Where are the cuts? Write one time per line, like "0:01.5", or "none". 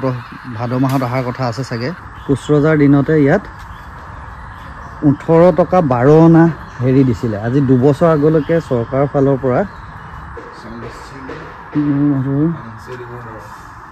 0:02.1
0:10.4